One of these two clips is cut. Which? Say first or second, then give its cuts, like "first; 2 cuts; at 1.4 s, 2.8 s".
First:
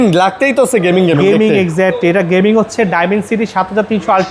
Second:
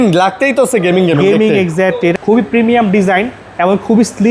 second; 1 cut; at 2.2 s